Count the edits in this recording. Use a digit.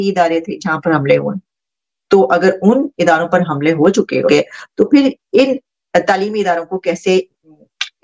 1